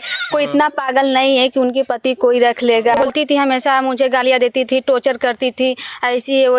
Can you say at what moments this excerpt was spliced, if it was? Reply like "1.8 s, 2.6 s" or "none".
3.1 s